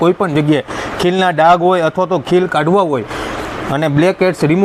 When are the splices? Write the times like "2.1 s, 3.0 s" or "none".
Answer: none